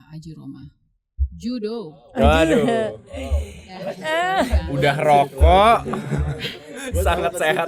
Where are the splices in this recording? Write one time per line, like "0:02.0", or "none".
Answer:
none

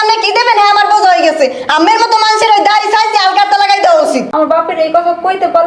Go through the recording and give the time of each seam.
0:04.3

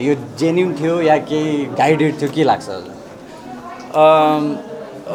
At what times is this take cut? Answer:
none

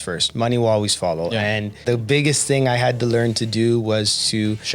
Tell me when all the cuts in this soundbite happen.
0:01.8

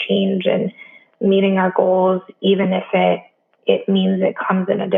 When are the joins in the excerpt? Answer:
none

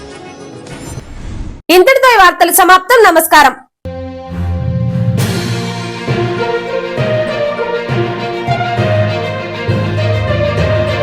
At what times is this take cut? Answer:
none

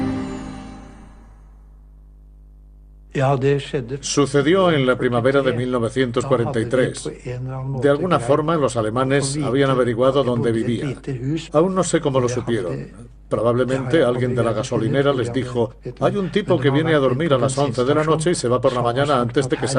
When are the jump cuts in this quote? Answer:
0:02.4

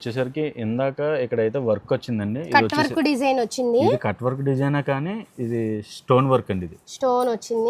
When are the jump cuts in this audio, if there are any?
none

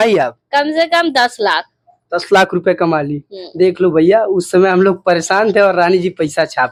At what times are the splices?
none

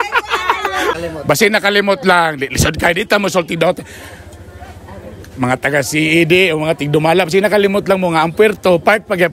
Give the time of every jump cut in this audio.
0:00.9

